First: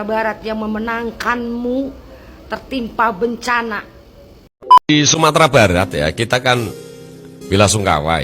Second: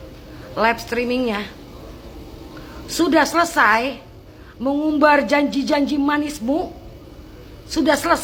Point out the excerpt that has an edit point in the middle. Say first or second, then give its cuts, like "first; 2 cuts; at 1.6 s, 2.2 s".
first; 1 cut; at 4.9 s